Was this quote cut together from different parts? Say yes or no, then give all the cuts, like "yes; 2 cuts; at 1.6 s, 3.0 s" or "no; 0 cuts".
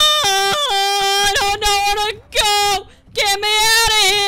no; 0 cuts